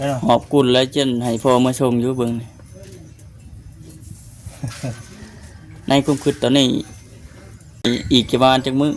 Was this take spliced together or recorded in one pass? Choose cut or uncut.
cut